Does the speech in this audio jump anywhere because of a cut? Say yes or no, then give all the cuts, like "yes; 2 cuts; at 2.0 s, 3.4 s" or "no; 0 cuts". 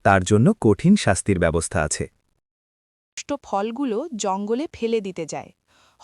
yes; 1 cut; at 3.2 s